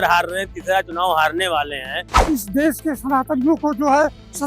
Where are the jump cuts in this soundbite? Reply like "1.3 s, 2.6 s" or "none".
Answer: 2.1 s

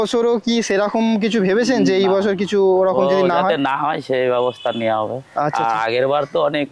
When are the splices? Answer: none

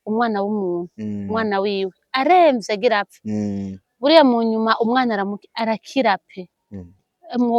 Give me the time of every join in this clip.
none

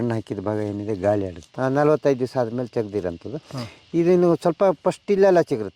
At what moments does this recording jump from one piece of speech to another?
1.5 s

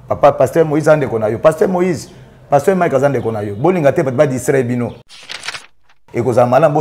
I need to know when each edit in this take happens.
5.5 s

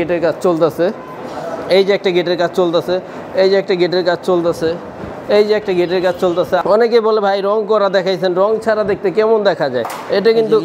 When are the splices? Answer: 6.6 s

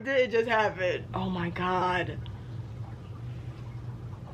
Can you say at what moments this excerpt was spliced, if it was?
1.1 s

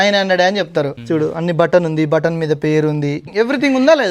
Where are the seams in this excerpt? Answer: 1.0 s, 3.3 s

